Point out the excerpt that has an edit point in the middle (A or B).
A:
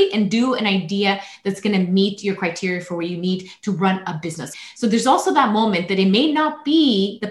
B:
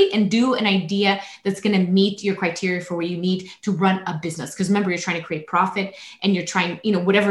A